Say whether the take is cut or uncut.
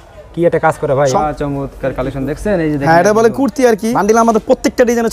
cut